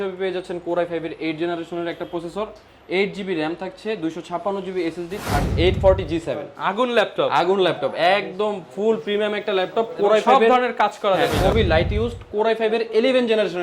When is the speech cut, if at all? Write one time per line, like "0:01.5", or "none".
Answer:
0:05.4
0:11.5